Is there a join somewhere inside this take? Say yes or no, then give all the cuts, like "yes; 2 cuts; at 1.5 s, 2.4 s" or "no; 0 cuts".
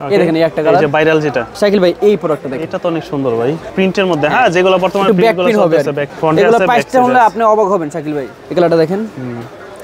yes; 4 cuts; at 1.5 s, 3.7 s, 6.1 s, 8.3 s